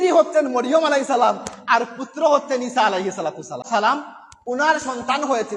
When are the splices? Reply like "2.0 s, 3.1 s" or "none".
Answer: 3.6 s